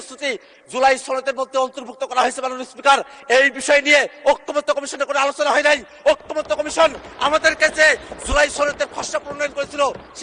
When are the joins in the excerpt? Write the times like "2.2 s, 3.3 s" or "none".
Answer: none